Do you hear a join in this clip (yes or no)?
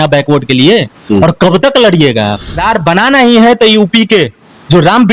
yes